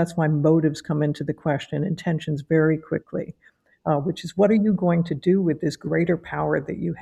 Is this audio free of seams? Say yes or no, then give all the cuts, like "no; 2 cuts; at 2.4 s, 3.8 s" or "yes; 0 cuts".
yes; 0 cuts